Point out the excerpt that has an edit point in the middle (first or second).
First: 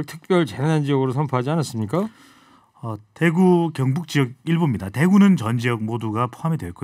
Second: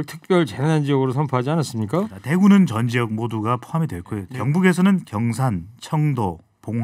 second